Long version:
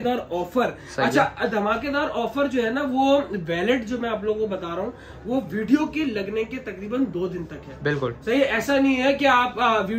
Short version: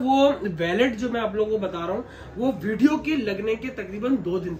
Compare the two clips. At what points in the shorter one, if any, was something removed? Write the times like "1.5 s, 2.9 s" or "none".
none